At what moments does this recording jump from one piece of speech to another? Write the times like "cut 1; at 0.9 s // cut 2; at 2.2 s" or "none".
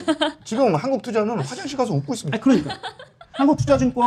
none